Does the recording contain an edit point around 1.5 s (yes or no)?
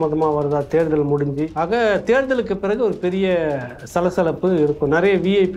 yes